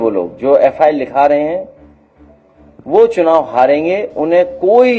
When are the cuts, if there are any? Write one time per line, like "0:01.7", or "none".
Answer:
none